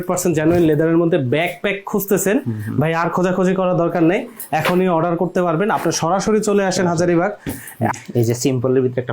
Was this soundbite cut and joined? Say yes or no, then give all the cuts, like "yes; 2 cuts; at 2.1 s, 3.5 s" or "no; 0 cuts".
yes; 1 cut; at 7.9 s